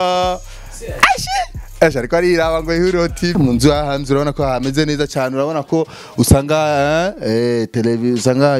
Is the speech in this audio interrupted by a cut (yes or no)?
yes